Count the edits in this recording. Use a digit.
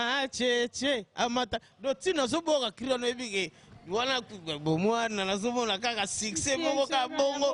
0